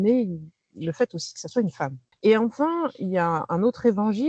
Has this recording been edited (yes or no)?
yes